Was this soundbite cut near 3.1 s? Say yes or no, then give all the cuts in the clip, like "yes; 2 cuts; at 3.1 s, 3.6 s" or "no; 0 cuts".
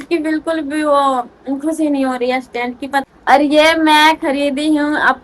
yes; 1 cut; at 3.1 s